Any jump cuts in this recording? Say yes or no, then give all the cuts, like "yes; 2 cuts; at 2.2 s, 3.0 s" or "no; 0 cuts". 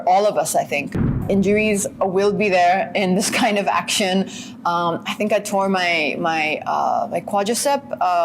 yes; 1 cut; at 1.1 s